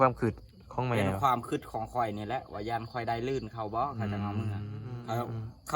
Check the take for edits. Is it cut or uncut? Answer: cut